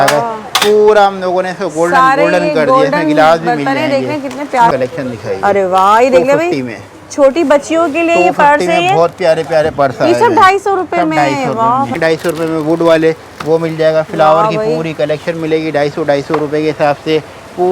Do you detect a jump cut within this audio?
yes; 2 cuts; at 4.7 s, 11.9 s

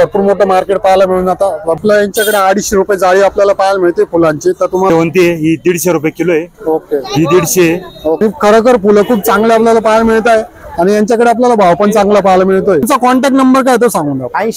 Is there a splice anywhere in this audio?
yes; 4 cuts; at 1.8 s, 4.9 s, 8.2 s, 12.9 s

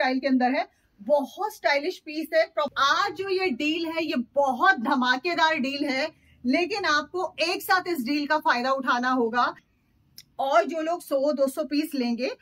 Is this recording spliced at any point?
yes; 2 cuts; at 2.7 s, 9.7 s

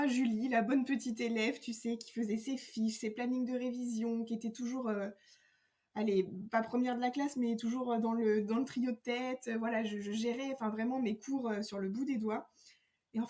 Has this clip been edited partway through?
no; 0 cuts

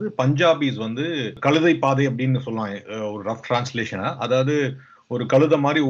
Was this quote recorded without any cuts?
no; 1 cut; at 1.3 s

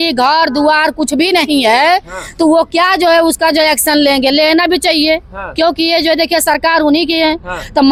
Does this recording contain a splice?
no; 0 cuts

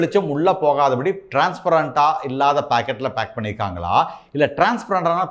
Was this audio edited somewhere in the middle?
no; 0 cuts

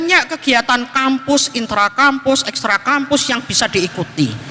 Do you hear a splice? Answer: no; 0 cuts

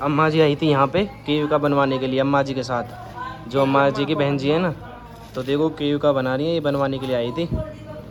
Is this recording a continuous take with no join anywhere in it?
yes; 0 cuts

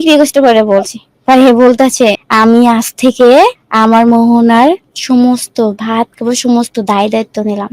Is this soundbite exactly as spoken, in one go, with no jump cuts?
no; 3 cuts; at 2.2 s, 3.6 s, 4.9 s

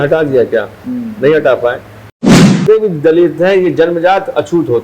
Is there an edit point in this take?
yes; 1 cut; at 2.1 s

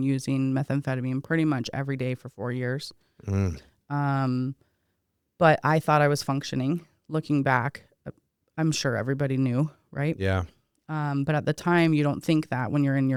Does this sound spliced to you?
no; 0 cuts

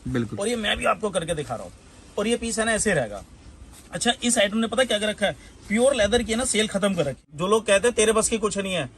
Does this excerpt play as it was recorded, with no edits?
no; 1 cut; at 7.3 s

